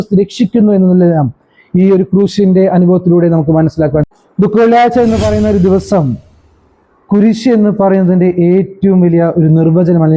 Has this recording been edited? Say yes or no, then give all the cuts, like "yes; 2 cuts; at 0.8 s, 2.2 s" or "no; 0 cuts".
yes; 1 cut; at 4.1 s